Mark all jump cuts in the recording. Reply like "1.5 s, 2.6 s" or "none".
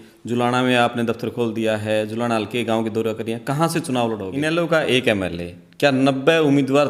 4.3 s